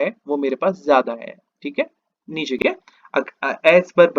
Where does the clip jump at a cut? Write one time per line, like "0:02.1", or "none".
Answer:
0:02.6